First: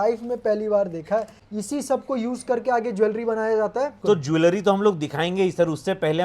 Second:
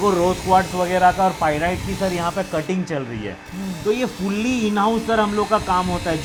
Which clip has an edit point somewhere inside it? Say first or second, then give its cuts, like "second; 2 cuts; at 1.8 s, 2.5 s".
first; 2 cuts; at 1.4 s, 4.0 s